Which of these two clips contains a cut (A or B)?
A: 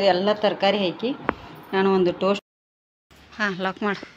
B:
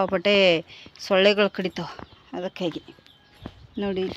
A